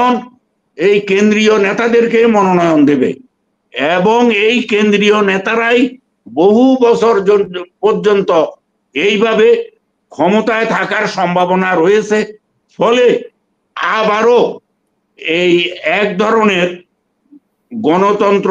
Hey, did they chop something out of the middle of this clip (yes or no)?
no